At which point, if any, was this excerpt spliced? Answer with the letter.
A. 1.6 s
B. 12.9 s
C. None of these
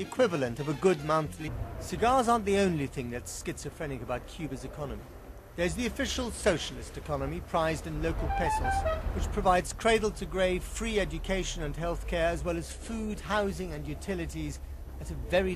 C